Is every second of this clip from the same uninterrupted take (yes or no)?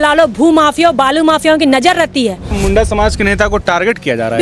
no